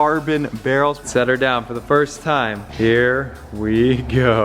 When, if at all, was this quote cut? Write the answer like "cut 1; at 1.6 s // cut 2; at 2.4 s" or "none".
cut 1; at 1.0 s // cut 2; at 2.6 s